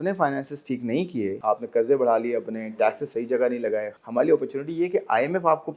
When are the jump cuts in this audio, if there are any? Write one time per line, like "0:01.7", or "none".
0:01.4
0:04.0